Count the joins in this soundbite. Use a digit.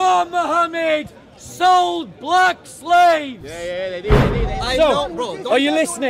1